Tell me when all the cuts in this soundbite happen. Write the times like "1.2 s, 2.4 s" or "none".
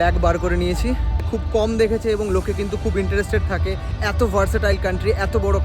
1.3 s